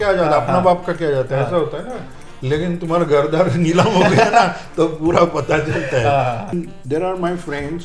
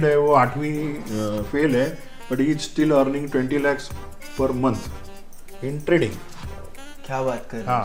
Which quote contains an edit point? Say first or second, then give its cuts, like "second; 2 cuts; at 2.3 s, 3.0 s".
first; 1 cut; at 6.5 s